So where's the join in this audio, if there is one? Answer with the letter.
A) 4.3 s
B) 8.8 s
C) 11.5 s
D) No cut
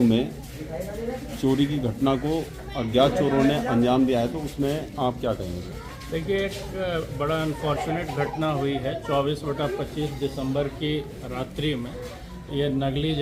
D